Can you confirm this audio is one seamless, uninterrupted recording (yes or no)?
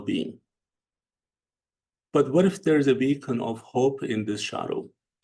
yes